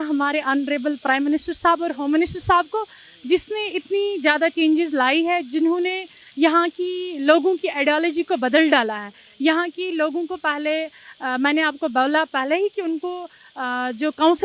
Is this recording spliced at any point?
no; 0 cuts

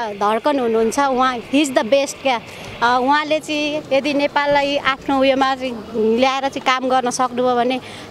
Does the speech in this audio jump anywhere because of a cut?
no; 0 cuts

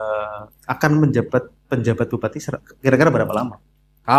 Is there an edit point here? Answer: no; 0 cuts

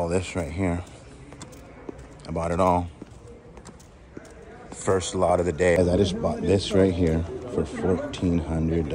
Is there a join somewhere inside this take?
yes; 1 cut; at 5.8 s

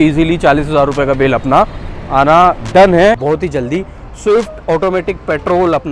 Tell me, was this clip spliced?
yes; 1 cut; at 3.2 s

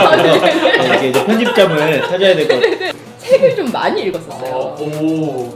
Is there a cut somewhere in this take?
yes; 1 cut; at 2.8 s

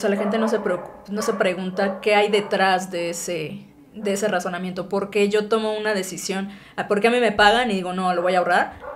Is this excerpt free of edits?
yes; 0 cuts

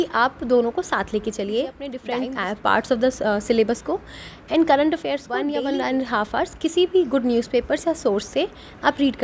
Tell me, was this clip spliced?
yes; 2 cuts; at 2.0 s, 5.4 s

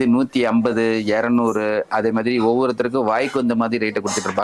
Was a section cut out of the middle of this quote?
no; 0 cuts

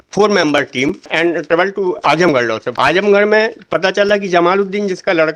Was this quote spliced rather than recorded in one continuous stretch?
yes; 2 cuts; at 1.1 s, 2.7 s

